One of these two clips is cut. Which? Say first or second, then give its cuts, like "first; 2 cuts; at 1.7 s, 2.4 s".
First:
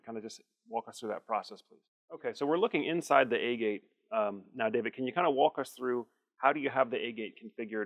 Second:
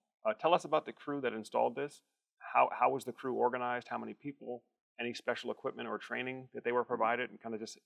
first; 1 cut; at 1.9 s